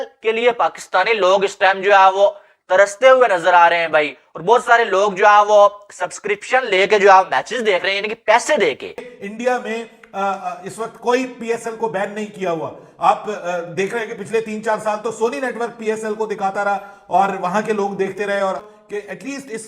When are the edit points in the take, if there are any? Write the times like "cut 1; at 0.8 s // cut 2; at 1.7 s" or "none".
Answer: cut 1; at 9.1 s // cut 2; at 18.7 s